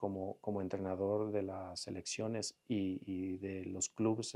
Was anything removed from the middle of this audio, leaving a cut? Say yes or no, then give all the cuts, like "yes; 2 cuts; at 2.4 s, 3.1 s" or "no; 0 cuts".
no; 0 cuts